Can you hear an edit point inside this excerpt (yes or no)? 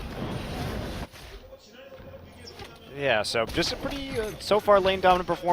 yes